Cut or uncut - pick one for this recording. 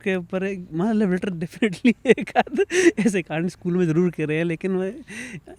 uncut